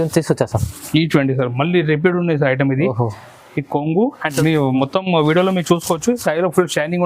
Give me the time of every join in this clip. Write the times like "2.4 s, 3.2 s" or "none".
4.3 s